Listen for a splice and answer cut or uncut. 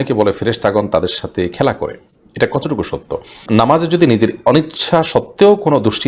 cut